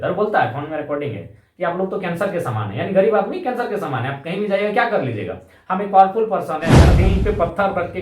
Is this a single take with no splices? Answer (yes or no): no